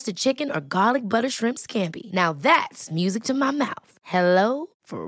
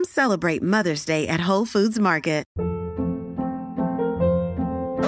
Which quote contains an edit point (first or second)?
second